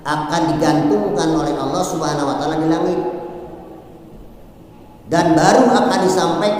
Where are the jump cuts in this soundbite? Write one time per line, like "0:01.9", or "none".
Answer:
none